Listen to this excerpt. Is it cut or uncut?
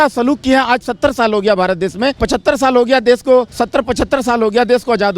cut